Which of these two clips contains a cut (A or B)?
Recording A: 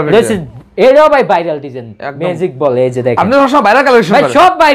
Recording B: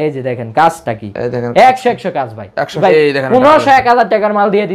B